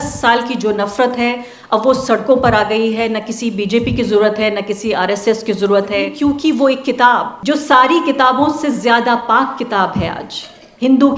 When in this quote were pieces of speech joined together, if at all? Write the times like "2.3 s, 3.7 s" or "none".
6.1 s, 7.3 s